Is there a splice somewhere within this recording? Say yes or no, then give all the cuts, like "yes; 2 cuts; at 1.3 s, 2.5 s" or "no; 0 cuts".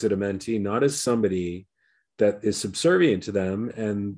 no; 0 cuts